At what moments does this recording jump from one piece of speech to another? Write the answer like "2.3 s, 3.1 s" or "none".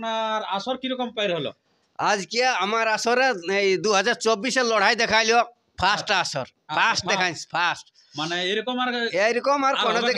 none